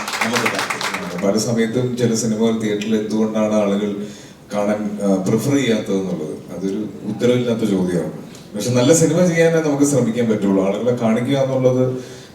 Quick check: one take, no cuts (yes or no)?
no